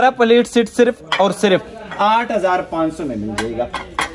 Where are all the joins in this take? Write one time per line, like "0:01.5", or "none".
none